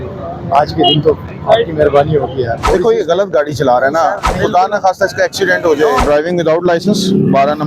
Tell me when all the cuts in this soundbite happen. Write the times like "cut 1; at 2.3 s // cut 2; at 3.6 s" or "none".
cut 1; at 2.6 s // cut 2; at 6.0 s